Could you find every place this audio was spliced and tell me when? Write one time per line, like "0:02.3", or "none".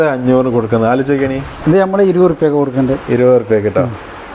0:01.5